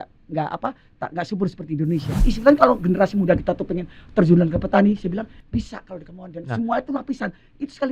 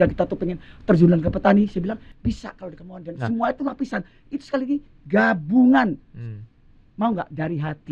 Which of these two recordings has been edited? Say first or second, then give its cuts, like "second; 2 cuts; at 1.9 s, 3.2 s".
first; 1 cut; at 2.3 s